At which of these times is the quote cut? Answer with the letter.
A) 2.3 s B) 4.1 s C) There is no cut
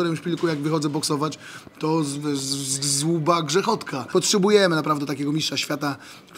B